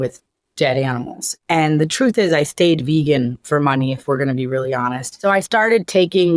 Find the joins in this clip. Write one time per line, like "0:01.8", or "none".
0:01.3
0:05.0